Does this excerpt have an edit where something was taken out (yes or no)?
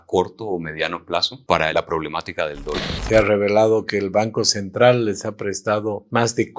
yes